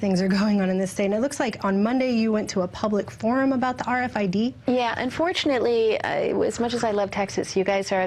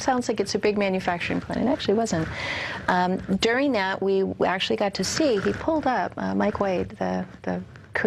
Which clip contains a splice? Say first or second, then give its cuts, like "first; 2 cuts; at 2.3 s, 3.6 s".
first; 1 cut; at 5.5 s